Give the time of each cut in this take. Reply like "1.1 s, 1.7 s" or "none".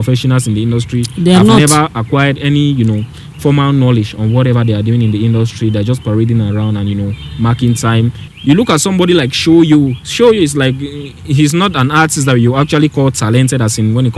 8.2 s